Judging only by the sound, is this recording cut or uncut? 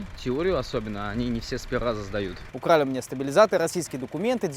cut